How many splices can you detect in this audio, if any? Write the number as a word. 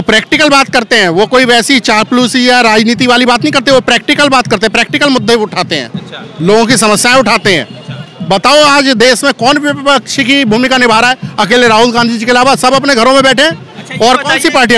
zero